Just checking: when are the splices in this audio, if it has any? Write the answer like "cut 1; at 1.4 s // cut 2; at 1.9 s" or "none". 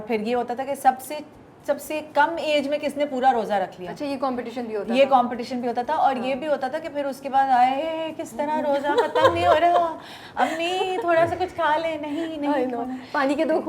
none